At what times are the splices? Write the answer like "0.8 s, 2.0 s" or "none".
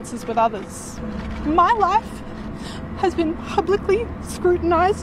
0.9 s